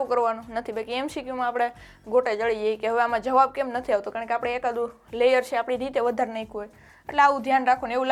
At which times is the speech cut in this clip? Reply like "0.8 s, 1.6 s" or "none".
none